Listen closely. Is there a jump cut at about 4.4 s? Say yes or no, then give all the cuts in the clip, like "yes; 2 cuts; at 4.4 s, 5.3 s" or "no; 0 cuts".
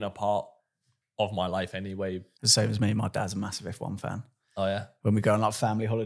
no; 1 cut; at 2.3 s